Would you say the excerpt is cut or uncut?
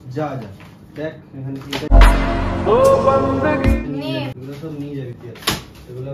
cut